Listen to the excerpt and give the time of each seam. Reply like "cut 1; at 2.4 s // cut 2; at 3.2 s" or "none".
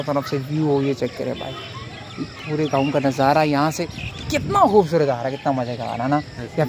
none